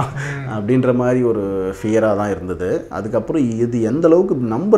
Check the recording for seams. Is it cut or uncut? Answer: uncut